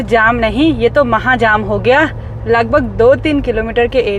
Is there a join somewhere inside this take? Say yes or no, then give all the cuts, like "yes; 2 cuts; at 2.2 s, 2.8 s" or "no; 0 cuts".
no; 0 cuts